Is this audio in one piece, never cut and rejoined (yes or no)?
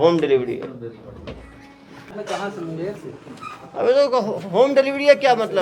no